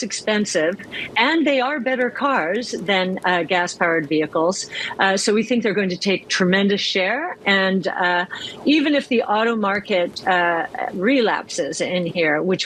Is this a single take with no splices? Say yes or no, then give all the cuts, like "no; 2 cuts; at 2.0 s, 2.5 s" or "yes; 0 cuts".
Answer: yes; 0 cuts